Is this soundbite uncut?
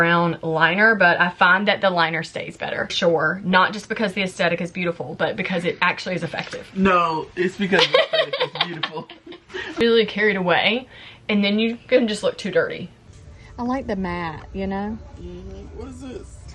no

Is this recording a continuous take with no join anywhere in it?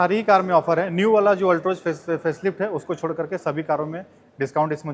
yes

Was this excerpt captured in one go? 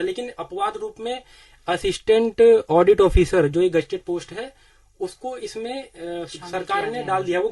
yes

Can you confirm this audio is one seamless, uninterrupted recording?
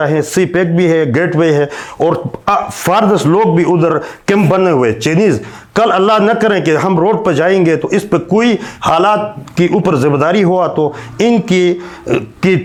yes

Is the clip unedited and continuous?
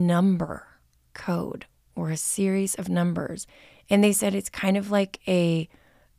yes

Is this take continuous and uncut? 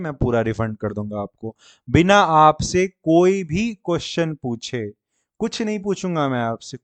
yes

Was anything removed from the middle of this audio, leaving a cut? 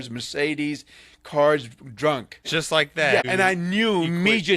yes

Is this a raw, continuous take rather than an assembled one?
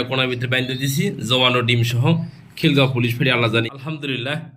no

